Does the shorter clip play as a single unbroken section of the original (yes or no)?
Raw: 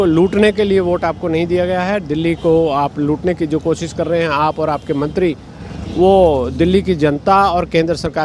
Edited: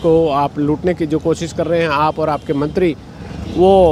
yes